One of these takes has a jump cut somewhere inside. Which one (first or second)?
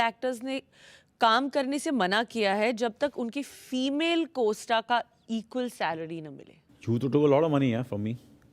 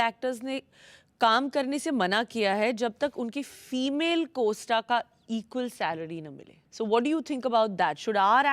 first